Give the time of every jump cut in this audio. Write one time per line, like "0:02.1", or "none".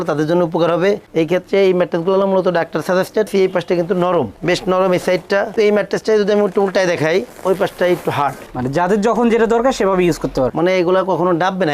0:03.3
0:05.5
0:10.5

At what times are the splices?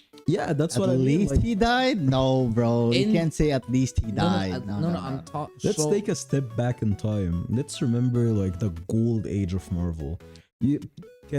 0:05.5

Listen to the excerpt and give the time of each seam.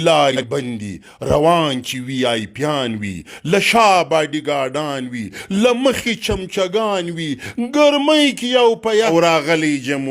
0:09.1

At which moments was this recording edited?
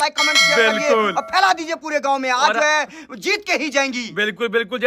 none

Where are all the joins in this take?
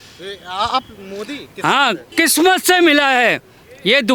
none

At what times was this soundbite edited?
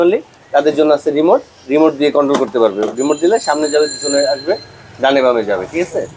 none

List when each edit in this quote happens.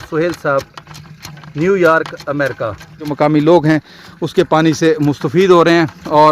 0:03.1

